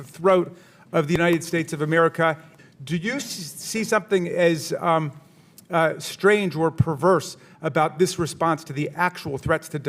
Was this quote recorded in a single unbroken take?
no; 1 cut; at 2.5 s

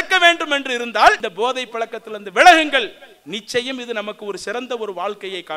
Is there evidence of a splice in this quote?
no; 0 cuts

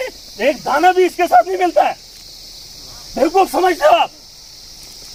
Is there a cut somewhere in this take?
no; 0 cuts

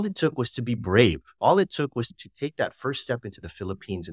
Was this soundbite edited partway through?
yes; 2 cuts; at 1.4 s, 2.2 s

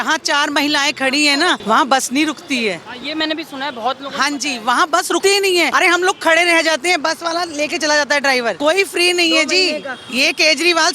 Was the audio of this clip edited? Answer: yes; 3 cuts; at 1.6 s, 5.3 s, 8.6 s

